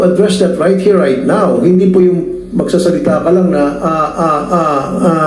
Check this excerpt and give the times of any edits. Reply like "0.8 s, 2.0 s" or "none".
none